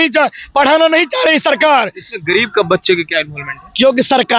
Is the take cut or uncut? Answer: uncut